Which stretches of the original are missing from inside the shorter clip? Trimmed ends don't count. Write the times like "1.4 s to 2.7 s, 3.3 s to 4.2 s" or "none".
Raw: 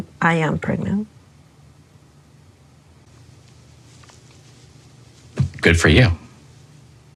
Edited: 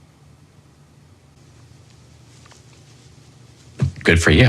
2.8 s to 3.0 s